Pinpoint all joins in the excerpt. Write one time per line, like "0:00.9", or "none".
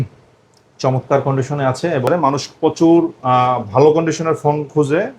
0:02.1